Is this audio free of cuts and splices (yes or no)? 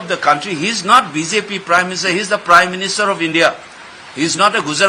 yes